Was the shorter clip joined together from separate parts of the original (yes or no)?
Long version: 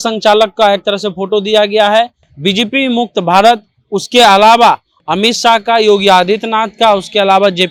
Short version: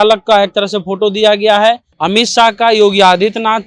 yes